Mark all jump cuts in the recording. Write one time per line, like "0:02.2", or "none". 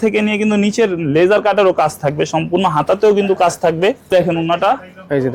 0:04.1